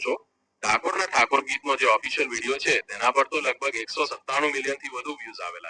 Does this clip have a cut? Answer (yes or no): no